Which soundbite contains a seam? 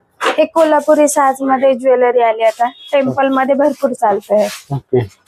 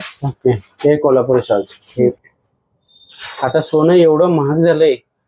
second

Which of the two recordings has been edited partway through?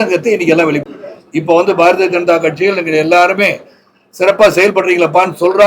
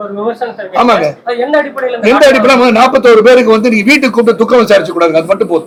first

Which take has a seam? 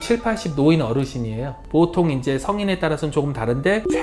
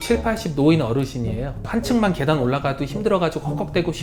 first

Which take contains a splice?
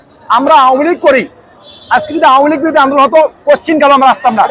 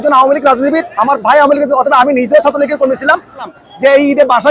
second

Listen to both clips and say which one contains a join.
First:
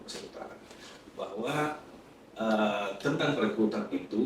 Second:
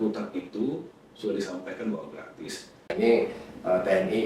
second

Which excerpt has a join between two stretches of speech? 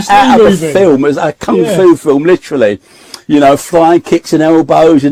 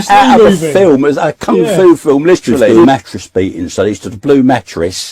second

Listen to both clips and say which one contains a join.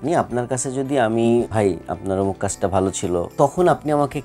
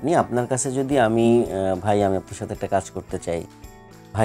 first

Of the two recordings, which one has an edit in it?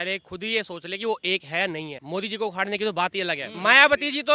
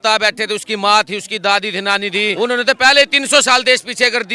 first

